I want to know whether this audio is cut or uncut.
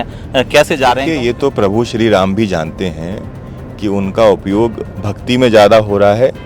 cut